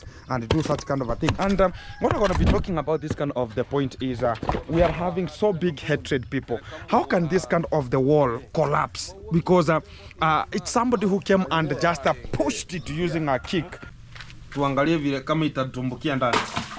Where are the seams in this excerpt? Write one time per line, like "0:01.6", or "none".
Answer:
0:13.9